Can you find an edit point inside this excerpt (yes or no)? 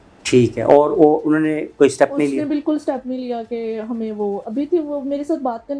no